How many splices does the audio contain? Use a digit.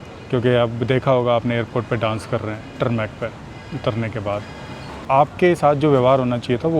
1